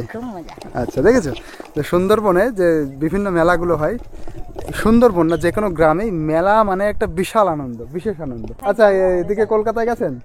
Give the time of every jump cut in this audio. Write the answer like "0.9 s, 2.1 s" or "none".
8.5 s